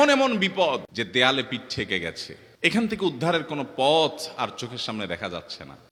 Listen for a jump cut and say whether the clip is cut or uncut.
uncut